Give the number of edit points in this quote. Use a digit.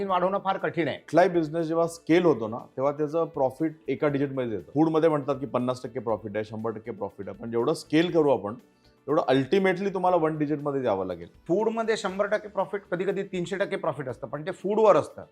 3